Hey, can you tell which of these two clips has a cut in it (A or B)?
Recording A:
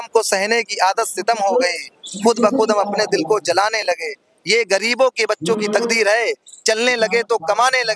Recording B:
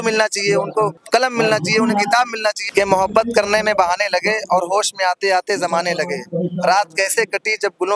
B